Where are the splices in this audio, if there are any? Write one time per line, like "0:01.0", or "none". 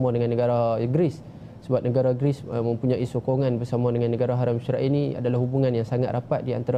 none